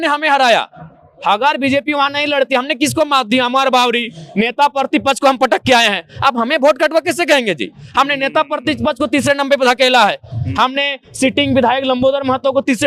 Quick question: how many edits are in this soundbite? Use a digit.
0